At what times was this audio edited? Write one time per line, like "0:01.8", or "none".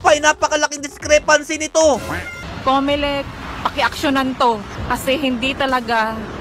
0:02.4